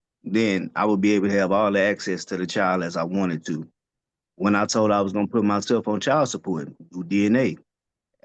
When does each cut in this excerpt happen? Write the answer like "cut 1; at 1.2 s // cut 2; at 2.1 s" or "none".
none